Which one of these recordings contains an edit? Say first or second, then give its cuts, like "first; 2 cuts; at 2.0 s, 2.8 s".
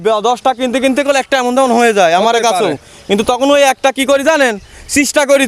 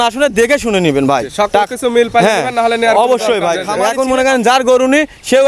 second; 1 cut; at 3.7 s